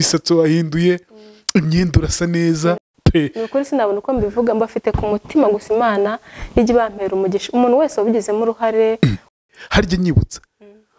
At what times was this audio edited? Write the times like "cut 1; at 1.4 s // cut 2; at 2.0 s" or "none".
cut 1; at 2.9 s // cut 2; at 9.3 s